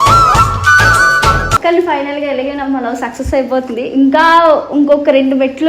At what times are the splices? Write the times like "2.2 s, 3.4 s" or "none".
1.5 s